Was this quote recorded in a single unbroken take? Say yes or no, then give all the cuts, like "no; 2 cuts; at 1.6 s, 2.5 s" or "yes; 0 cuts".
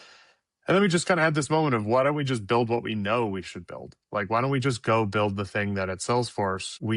yes; 0 cuts